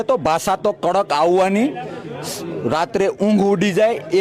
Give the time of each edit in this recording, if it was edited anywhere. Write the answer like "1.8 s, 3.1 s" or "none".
none